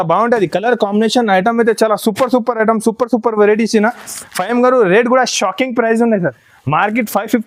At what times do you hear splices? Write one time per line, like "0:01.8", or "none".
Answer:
none

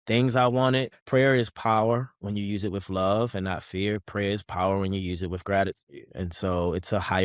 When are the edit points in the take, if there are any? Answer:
0:00.9

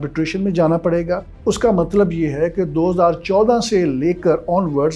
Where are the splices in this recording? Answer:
0:01.3

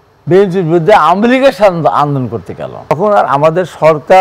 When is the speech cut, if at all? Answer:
0:02.9

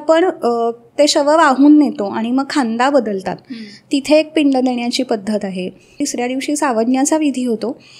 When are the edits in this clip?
0:06.0

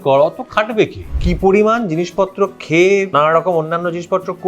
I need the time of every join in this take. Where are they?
0:01.0
0:03.1

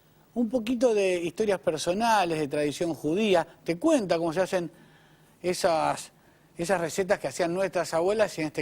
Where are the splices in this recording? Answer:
0:02.2

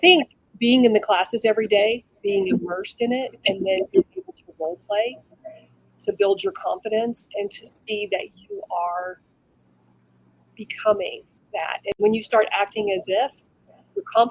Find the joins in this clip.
0:11.9

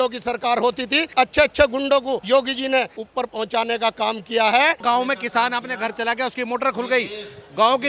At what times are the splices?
0:01.1
0:02.2
0:03.0
0:04.8

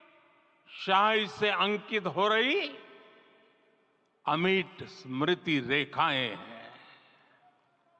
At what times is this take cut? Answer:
0:05.9

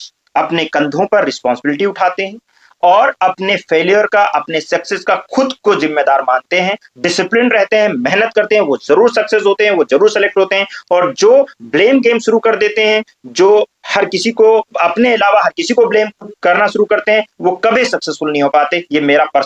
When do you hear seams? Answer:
none

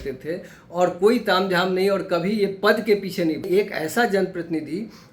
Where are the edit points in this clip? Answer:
0:03.5

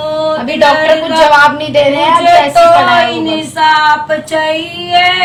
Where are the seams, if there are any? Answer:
none

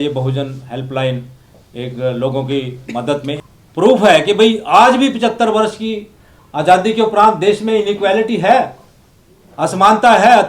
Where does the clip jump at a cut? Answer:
0:03.4

